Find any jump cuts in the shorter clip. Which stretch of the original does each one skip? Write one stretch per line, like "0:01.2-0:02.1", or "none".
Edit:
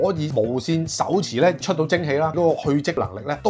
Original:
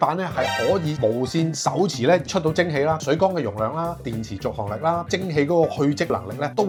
0:03.0-0:05.5